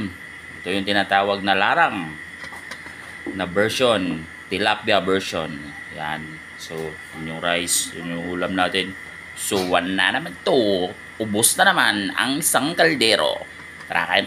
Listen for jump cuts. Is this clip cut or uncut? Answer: uncut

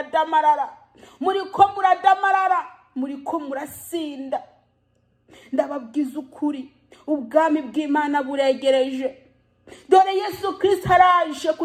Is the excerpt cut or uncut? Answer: uncut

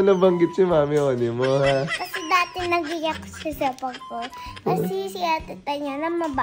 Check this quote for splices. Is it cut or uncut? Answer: cut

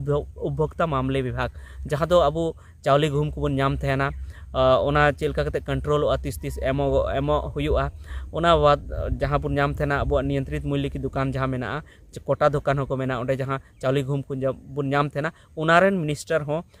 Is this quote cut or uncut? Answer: uncut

